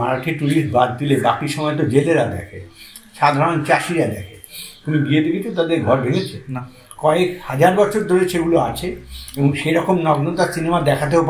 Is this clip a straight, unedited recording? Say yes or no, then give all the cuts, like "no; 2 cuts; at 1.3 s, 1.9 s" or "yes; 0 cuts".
yes; 0 cuts